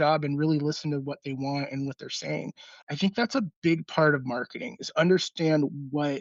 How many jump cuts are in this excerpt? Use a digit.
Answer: 1